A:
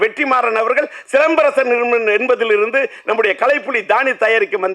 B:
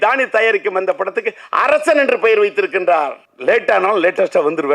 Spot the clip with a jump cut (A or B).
B